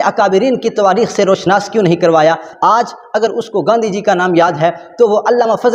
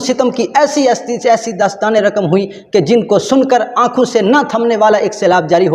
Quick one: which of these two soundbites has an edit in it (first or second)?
first